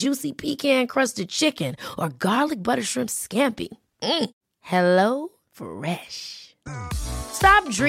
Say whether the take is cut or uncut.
uncut